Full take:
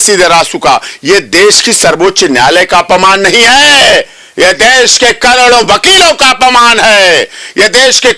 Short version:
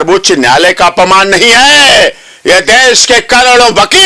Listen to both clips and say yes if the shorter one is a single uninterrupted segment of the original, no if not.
yes